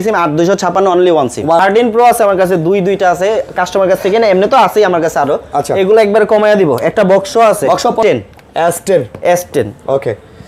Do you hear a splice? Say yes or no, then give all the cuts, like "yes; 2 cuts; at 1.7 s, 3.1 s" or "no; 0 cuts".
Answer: yes; 2 cuts; at 1.6 s, 8.0 s